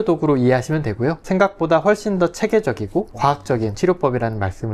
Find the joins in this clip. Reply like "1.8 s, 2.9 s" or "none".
1.2 s, 3.4 s